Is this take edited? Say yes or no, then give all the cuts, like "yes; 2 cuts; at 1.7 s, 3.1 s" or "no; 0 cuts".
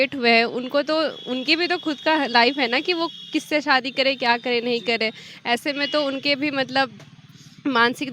no; 0 cuts